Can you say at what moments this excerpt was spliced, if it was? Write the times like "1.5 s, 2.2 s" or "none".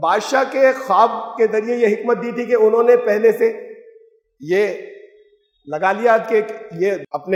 none